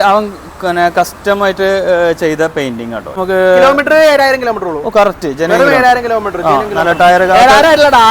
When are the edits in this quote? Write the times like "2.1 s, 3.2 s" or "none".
3.2 s